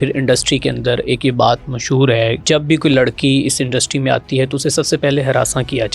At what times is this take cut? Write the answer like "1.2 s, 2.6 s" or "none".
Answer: 2.4 s